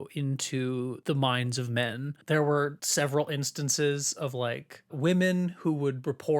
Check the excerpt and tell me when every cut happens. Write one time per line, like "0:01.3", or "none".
0:01.0
0:02.1
0:02.8